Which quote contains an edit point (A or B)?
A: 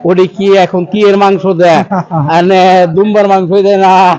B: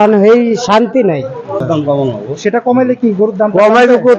B